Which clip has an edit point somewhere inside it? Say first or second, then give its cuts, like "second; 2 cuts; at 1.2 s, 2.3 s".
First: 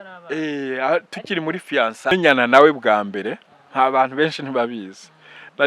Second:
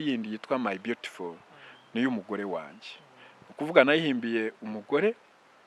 first; 1 cut; at 2.1 s